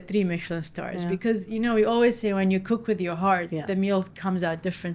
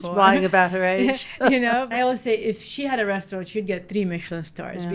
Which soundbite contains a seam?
second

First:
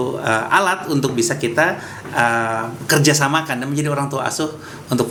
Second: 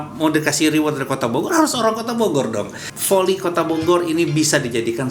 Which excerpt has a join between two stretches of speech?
second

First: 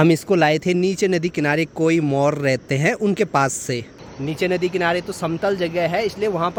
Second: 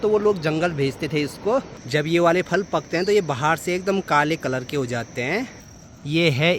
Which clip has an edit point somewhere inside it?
second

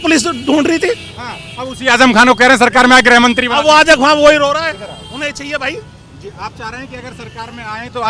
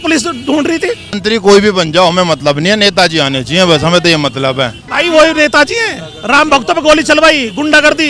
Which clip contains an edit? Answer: second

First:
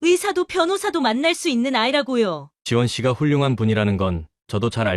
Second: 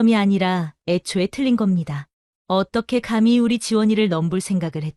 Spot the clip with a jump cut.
first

